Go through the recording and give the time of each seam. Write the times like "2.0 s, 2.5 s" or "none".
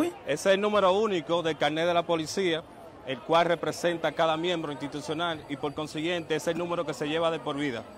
6.0 s